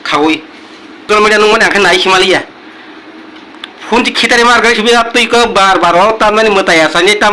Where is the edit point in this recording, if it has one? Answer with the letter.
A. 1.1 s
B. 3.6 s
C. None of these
A